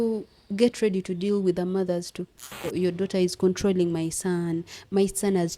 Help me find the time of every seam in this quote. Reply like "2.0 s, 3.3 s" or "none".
2.7 s